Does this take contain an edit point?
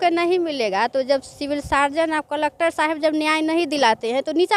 no; 0 cuts

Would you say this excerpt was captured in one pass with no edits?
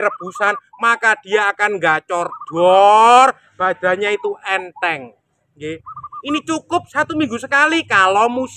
yes; 0 cuts

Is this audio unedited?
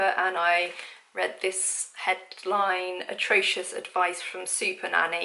yes; 0 cuts

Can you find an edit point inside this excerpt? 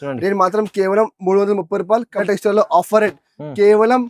yes; 1 cut; at 2.2 s

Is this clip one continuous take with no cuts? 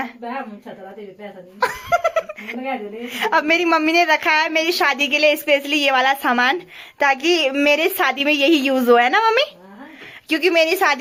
yes; 0 cuts

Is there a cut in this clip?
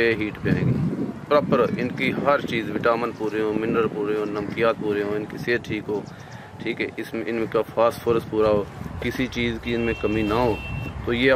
no; 0 cuts

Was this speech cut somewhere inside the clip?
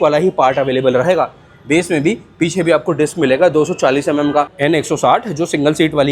yes; 1 cut; at 4.5 s

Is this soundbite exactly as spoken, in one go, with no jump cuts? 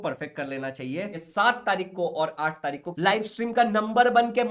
no; 2 cuts; at 1.2 s, 2.9 s

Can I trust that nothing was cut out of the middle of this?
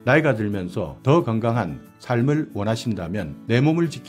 yes; 0 cuts

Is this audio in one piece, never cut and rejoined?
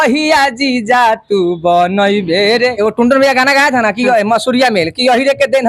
no; 1 cut; at 2.8 s

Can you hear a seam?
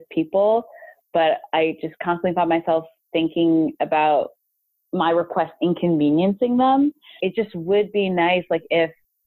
yes; 1 cut; at 7.2 s

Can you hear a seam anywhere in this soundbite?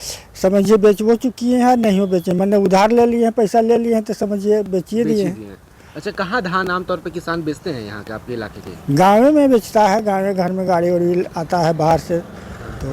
no; 0 cuts

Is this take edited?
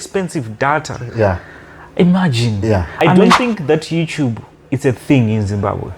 yes; 1 cut; at 3.0 s

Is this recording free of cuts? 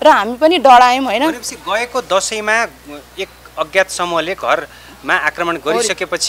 yes; 0 cuts

